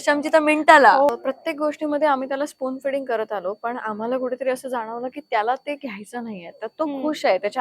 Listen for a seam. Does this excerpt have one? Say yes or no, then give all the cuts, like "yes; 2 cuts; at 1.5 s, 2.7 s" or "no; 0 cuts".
yes; 1 cut; at 1.1 s